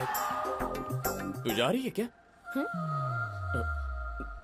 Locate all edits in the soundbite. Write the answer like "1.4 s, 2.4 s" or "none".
1.4 s